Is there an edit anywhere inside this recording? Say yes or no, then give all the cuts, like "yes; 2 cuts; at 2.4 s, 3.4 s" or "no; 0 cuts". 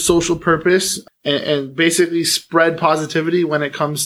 yes; 1 cut; at 1.0 s